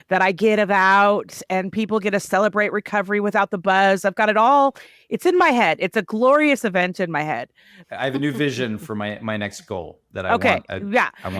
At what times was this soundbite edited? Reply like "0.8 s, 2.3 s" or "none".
7.7 s